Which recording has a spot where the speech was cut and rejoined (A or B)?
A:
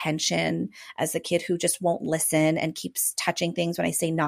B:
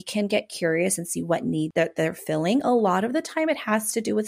B